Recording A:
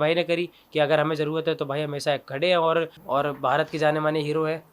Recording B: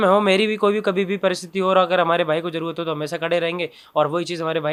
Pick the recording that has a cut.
A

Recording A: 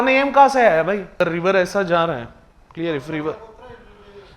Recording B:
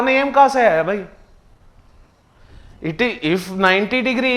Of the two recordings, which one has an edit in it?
A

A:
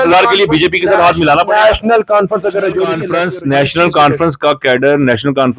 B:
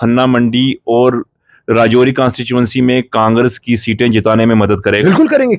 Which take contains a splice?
A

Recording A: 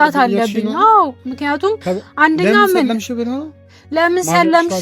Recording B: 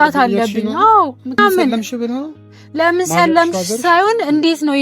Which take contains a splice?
B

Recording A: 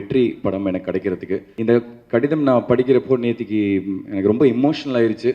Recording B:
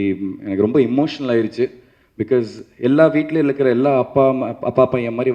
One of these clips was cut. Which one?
A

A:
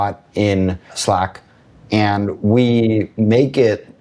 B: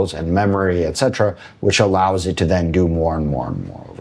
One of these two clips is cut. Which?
A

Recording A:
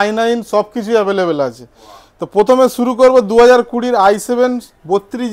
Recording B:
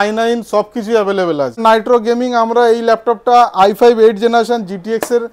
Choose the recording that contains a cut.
B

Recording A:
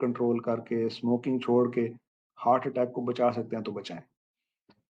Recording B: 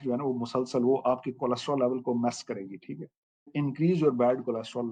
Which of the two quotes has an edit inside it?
B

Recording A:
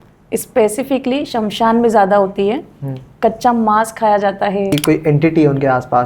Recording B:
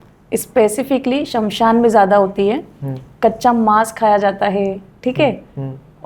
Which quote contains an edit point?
A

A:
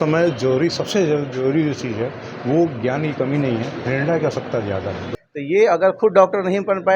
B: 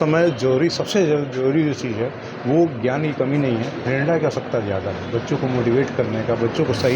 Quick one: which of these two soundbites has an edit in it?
A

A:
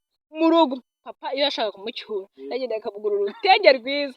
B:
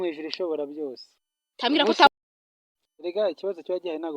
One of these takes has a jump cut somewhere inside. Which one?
B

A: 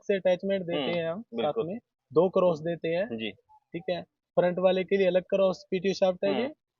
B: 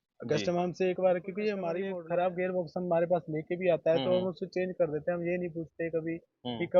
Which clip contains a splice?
B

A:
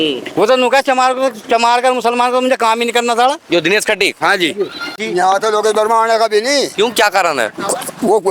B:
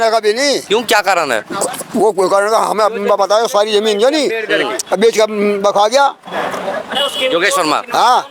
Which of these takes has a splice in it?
A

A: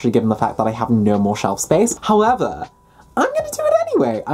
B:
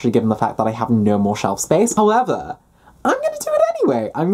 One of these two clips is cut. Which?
B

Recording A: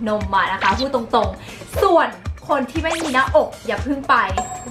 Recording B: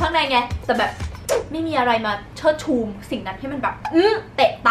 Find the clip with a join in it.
B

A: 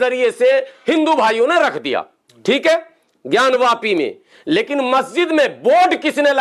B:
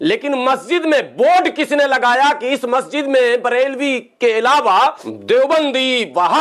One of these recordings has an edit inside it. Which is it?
B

